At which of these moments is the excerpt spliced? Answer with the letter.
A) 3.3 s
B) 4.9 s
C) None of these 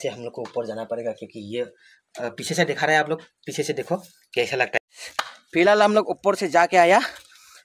B